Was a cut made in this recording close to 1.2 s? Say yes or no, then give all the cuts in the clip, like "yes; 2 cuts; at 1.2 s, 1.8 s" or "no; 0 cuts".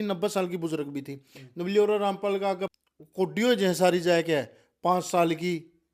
no; 1 cut; at 2.7 s